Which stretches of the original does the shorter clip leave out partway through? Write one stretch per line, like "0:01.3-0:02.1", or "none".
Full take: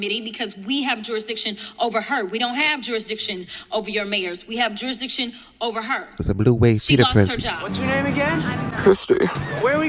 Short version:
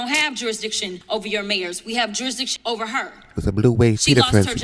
0:03.4-0:03.6
0:05.6-0:05.8